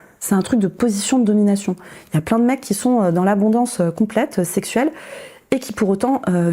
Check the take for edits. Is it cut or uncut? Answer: uncut